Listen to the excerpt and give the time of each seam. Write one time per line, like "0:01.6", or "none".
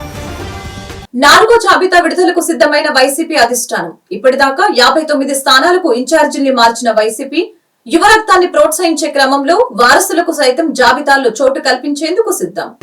0:01.0